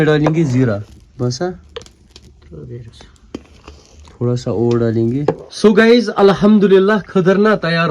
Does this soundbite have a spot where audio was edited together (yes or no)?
yes